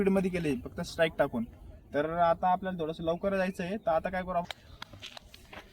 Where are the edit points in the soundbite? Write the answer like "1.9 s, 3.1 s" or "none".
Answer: 4.5 s